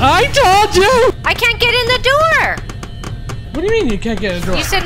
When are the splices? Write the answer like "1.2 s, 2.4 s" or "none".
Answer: 1.2 s